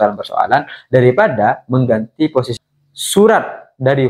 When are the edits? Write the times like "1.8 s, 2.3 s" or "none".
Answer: 2.6 s